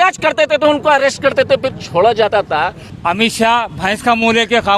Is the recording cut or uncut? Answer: cut